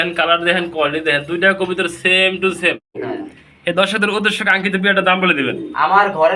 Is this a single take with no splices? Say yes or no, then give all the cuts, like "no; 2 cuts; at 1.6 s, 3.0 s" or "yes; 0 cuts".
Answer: no; 1 cut; at 2.9 s